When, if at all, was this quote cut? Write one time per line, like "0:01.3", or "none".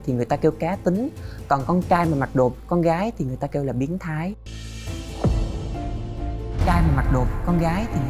none